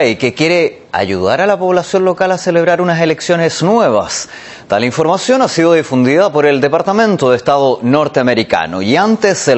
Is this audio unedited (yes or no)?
yes